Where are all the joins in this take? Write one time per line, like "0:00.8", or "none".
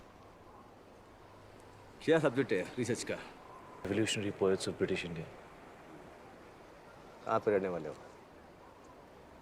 0:03.9